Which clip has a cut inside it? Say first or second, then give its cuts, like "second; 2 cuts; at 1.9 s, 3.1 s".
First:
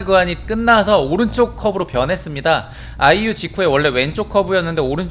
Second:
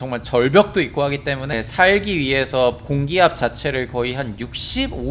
second; 1 cut; at 1.5 s